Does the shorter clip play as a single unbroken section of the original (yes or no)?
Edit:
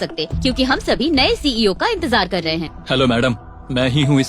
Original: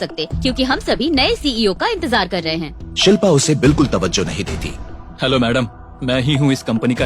no